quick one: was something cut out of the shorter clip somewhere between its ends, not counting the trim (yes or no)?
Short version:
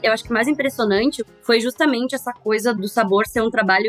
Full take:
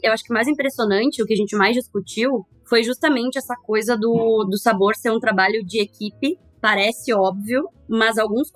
yes